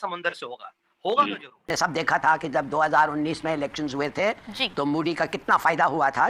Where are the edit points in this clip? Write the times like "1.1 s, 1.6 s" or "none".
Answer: 1.7 s